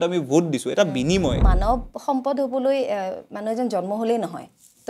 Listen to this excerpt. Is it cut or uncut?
cut